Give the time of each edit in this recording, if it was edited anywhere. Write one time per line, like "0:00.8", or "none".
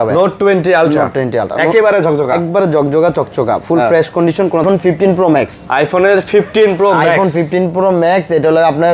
0:04.6